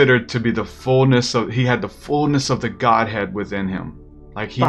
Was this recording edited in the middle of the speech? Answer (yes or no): no